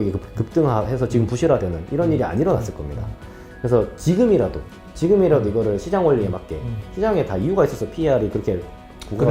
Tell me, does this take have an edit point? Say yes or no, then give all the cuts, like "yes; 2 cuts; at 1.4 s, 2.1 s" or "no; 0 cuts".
no; 0 cuts